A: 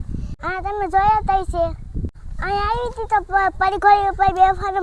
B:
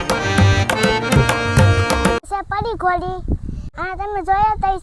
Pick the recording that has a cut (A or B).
B